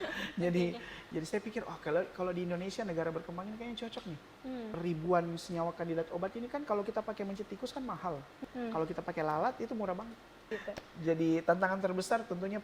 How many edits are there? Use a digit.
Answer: 3